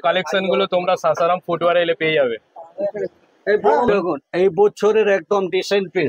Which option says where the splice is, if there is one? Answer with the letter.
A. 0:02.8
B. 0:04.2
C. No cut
C